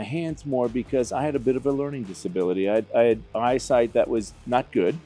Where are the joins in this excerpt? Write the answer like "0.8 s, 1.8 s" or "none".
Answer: none